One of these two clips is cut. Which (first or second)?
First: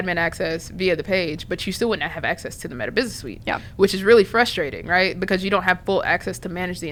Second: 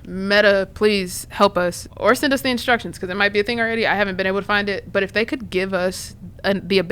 second